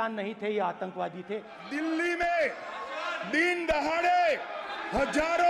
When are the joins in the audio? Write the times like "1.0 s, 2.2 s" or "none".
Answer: 1.6 s